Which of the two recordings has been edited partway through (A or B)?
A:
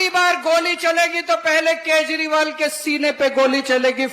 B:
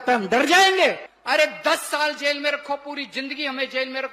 B